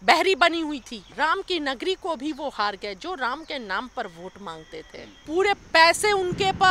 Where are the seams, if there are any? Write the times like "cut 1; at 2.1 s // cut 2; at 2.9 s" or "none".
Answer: cut 1; at 1.0 s // cut 2; at 5.2 s